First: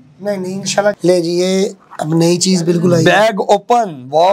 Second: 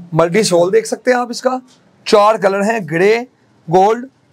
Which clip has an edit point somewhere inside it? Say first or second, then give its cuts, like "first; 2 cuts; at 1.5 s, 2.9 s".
first; 1 cut; at 1.0 s